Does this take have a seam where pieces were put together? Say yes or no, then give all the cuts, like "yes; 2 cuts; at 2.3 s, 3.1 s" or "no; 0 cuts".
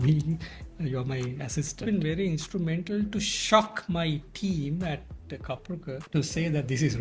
yes; 2 cuts; at 1.8 s, 6.0 s